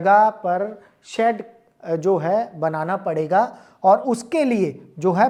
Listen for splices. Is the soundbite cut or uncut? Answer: uncut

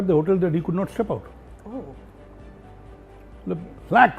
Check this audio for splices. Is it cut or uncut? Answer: uncut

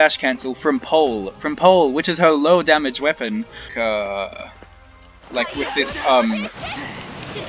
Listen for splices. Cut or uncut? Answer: cut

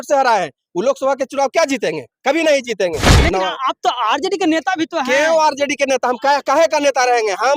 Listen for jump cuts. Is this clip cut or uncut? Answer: cut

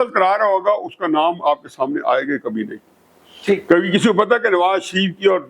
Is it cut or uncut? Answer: uncut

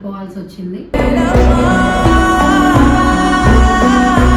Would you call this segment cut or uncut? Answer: uncut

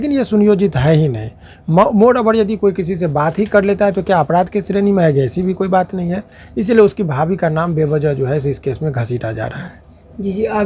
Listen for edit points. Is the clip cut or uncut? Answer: uncut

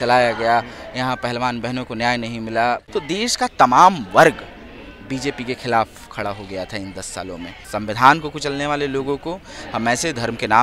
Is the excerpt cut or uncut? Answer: cut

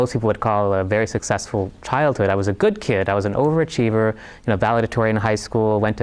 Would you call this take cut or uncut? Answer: uncut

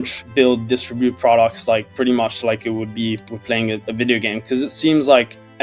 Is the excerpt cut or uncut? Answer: cut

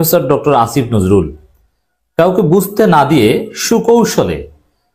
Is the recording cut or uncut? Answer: uncut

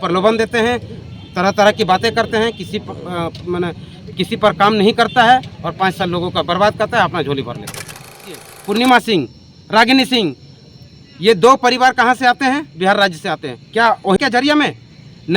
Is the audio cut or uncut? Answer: cut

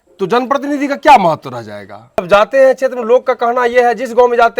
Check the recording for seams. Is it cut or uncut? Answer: cut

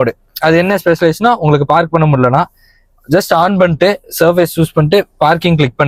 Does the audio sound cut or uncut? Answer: uncut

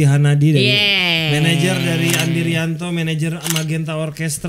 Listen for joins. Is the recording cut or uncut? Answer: uncut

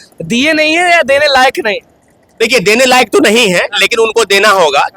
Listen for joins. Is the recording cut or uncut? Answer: uncut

